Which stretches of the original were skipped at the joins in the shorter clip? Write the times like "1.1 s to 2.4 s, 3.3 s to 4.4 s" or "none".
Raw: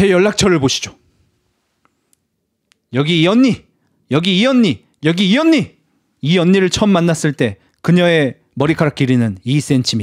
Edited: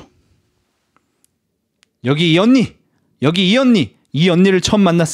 4.9 s to 6.1 s